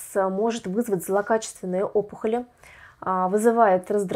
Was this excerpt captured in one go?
yes; 0 cuts

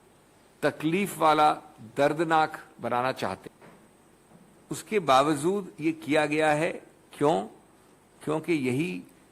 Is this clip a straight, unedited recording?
no; 1 cut; at 3.4 s

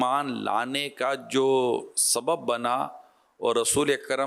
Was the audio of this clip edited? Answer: no; 0 cuts

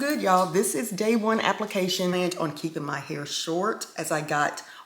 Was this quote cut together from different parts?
yes; 1 cut; at 2.1 s

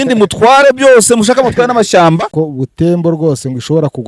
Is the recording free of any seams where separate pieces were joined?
no; 1 cut; at 2.3 s

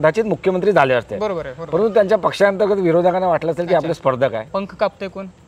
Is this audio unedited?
yes; 0 cuts

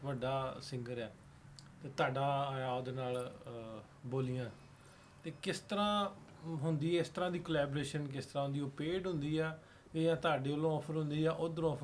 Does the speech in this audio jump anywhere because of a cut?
no; 0 cuts

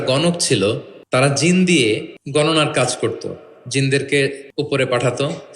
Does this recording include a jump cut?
yes; 3 cuts; at 0.9 s, 2.1 s, 4.4 s

